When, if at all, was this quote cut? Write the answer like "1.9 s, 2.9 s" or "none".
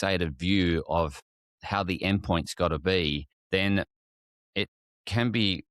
1.4 s, 3.3 s